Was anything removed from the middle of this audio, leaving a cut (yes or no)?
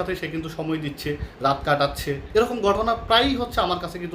yes